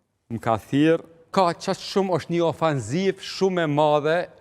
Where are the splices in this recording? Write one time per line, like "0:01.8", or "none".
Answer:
0:01.3